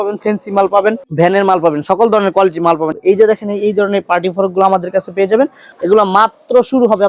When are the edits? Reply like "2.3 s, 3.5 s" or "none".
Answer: 2.9 s, 5.7 s